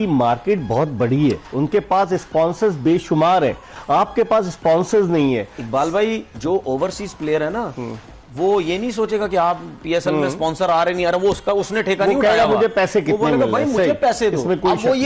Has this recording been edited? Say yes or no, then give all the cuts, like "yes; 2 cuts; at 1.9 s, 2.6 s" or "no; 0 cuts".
no; 0 cuts